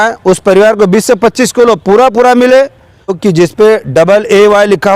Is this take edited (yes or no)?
yes